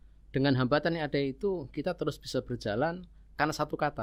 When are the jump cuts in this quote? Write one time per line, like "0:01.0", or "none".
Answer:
none

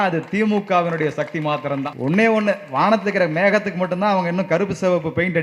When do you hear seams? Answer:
0:01.9

